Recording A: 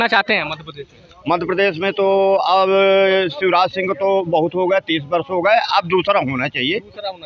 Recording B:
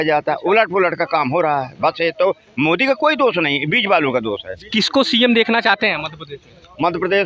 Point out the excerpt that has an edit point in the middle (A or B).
B